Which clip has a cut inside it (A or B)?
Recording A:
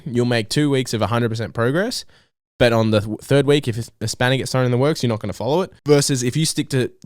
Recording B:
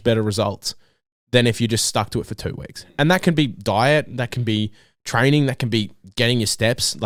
A